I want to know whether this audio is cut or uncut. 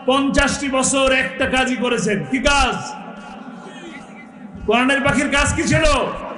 uncut